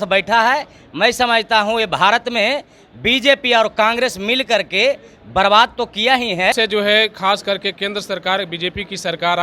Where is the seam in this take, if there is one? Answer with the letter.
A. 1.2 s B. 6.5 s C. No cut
B